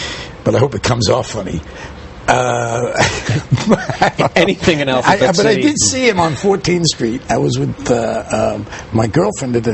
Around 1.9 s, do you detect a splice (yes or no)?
no